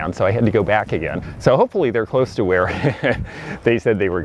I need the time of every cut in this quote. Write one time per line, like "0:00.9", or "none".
0:01.3

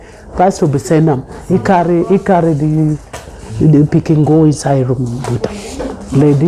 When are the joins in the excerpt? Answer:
none

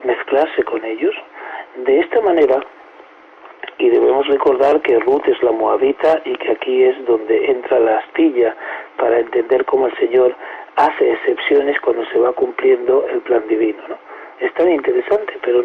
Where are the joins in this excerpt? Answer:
none

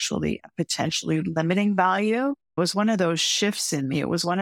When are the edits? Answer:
0:02.6

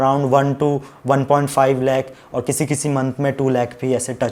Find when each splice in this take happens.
none

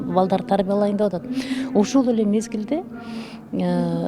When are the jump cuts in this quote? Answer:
none

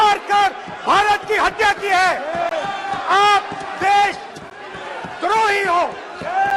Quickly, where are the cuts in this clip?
none

